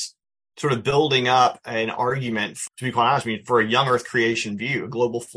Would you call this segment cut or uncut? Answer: cut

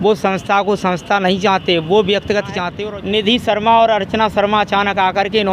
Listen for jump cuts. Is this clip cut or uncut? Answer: cut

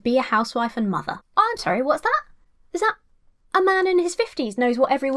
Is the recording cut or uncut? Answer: cut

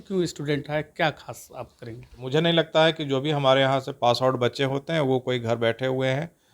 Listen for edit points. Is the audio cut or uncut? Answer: cut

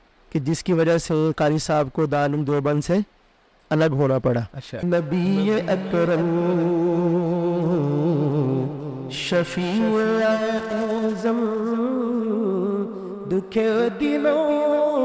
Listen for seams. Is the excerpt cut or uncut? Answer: cut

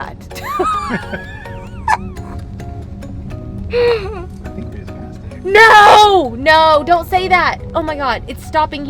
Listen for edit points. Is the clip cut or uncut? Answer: uncut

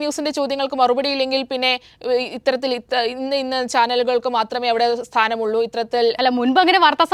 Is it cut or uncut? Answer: uncut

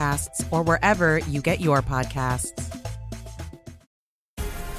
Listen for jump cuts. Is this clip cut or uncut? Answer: cut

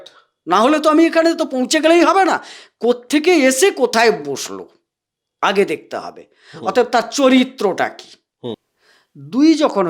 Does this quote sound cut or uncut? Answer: cut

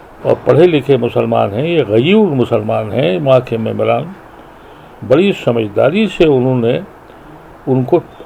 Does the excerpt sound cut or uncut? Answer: uncut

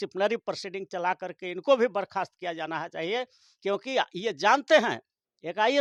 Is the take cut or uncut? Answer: uncut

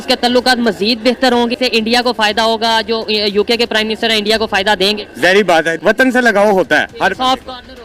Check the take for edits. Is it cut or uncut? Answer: uncut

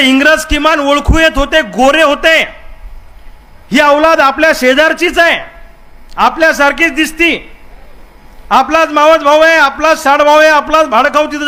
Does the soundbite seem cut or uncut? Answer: uncut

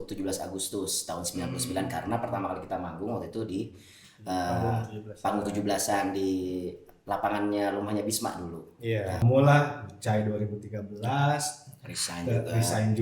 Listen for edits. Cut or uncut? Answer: cut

